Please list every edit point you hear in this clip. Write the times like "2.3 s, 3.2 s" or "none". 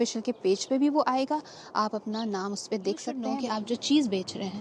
3.3 s